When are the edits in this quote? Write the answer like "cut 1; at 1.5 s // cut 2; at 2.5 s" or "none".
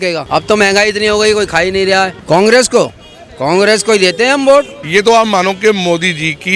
cut 1; at 2.2 s // cut 2; at 4.8 s